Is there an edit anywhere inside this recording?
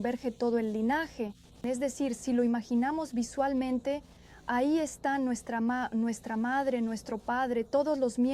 no; 0 cuts

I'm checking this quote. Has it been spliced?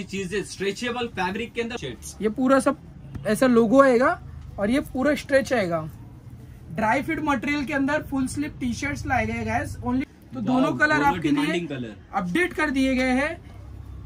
yes; 2 cuts; at 1.8 s, 10.1 s

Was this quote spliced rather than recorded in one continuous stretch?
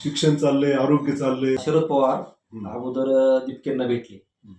yes; 1 cut; at 1.6 s

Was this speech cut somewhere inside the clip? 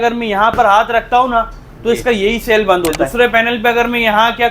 yes; 1 cut; at 3.0 s

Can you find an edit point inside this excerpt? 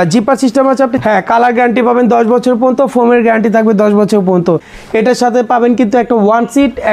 yes; 2 cuts; at 1.0 s, 4.7 s

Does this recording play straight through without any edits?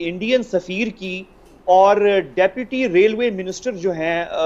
yes; 0 cuts

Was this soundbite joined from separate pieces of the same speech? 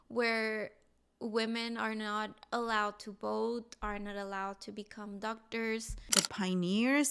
yes; 1 cut; at 6.1 s

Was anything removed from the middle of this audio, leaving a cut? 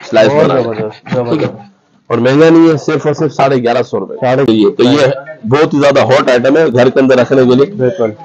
yes; 1 cut; at 4.5 s

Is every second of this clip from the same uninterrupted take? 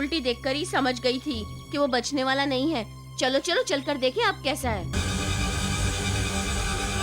no; 1 cut; at 4.9 s

